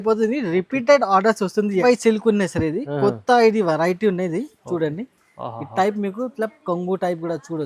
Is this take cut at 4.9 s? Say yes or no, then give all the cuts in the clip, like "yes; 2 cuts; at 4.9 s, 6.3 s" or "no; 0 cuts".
no; 1 cut; at 1.8 s